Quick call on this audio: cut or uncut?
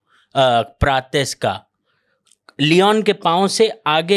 uncut